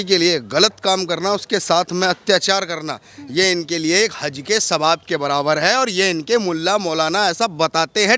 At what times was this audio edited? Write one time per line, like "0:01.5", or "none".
none